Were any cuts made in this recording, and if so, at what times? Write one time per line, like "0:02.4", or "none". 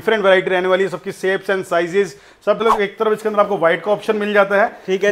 0:02.6